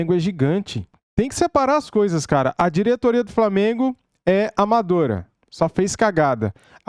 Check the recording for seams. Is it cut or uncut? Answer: cut